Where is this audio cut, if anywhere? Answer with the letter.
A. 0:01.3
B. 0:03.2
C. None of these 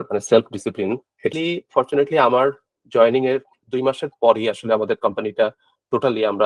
A